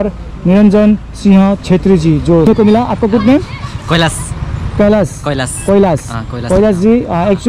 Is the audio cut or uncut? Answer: cut